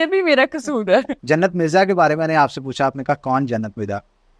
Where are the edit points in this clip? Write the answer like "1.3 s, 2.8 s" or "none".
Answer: 1.2 s